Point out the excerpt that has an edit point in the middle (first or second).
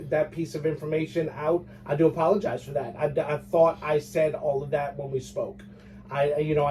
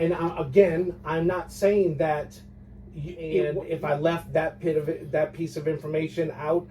second